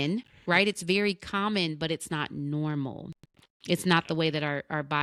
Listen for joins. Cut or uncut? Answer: uncut